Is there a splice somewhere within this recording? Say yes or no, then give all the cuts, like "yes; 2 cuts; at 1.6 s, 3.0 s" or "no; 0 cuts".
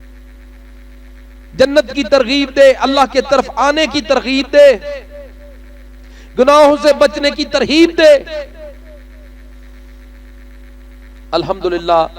no; 0 cuts